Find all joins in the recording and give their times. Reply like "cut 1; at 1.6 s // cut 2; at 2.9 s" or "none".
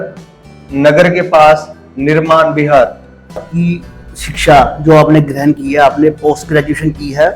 cut 1; at 3.5 s